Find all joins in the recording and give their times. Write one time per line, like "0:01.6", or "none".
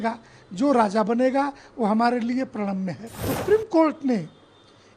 0:03.3